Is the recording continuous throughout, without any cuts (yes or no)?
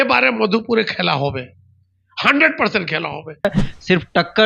no